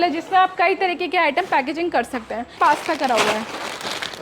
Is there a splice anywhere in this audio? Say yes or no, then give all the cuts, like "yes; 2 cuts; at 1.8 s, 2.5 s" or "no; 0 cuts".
yes; 1 cut; at 2.5 s